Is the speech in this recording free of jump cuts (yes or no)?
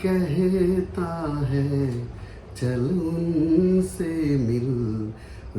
yes